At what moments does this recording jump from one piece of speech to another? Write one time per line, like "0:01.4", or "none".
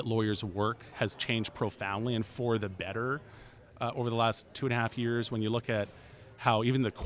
none